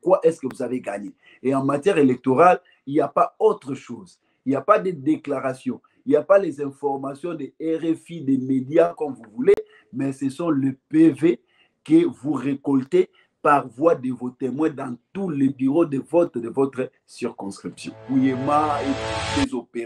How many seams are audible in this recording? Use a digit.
1